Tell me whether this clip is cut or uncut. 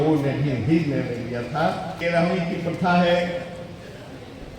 cut